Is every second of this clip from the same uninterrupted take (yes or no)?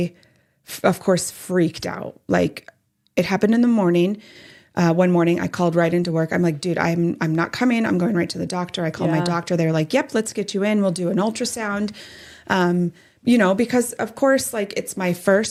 yes